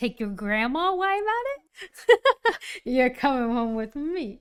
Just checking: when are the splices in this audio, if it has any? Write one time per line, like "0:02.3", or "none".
none